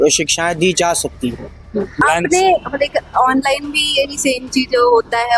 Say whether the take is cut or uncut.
cut